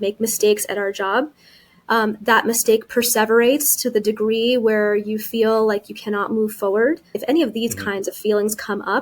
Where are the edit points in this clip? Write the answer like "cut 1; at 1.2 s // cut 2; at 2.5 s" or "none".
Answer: cut 1; at 7.2 s